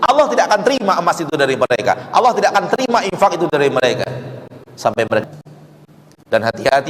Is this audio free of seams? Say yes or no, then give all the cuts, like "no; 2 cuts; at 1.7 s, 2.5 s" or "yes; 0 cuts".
no; 1 cut; at 5.2 s